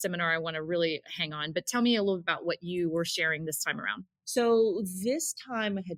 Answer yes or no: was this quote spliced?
no